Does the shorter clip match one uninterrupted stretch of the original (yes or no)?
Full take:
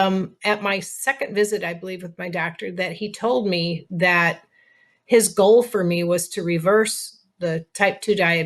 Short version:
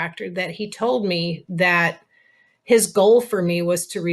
yes